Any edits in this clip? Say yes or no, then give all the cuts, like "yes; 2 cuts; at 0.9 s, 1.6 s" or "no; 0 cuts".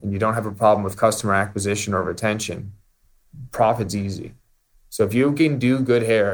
no; 0 cuts